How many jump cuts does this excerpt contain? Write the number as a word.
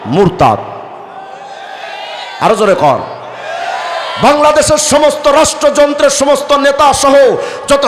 zero